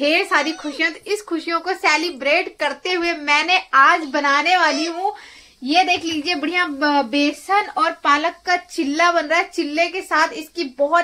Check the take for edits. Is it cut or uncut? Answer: uncut